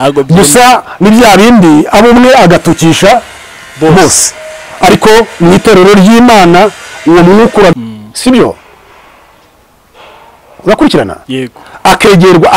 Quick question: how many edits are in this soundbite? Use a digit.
1